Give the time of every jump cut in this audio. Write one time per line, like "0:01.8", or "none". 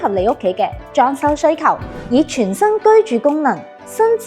0:01.9